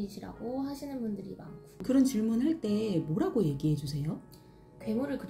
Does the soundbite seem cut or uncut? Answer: cut